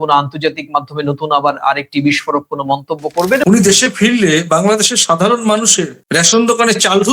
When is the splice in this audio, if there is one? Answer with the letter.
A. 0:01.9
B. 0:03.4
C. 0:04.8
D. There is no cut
B